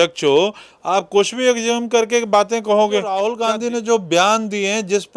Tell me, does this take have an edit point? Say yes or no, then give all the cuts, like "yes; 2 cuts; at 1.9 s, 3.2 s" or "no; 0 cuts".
yes; 1 cut; at 3.3 s